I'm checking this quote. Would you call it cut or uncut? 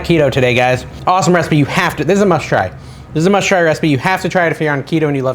cut